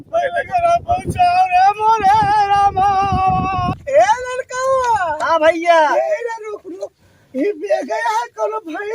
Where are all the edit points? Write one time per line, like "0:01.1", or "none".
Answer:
0:03.7